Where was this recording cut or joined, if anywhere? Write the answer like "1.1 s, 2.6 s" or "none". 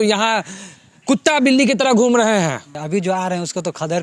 2.7 s